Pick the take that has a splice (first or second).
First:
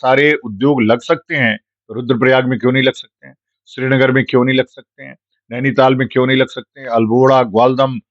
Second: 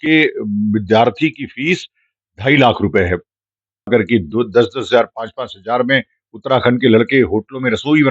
second